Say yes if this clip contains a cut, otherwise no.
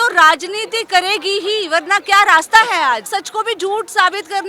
yes